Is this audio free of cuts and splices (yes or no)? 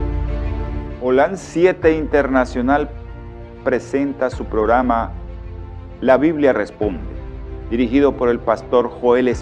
no